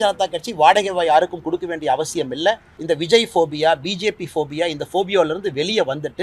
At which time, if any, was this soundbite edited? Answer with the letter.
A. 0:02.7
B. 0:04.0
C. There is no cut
A